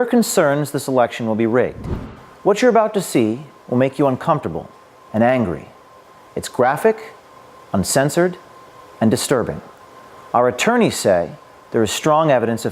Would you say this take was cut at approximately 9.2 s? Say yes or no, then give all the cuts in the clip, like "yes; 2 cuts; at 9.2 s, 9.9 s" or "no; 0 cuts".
no; 1 cut; at 5.4 s